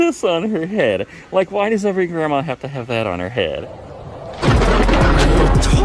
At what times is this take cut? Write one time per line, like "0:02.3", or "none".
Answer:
0:03.7